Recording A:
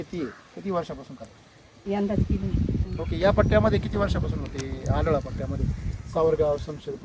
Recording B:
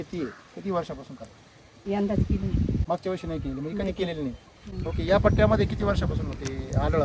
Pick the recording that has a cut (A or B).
A